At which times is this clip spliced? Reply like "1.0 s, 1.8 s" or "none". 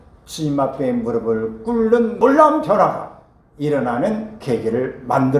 2.1 s